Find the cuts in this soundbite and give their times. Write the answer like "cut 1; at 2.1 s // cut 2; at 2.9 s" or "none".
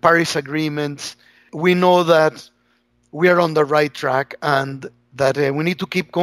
cut 1; at 1.5 s